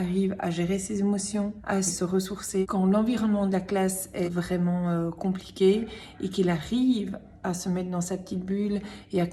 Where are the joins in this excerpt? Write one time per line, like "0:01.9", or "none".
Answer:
none